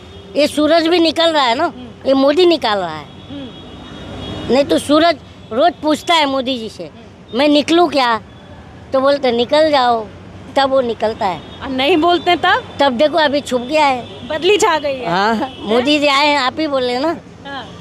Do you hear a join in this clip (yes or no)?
no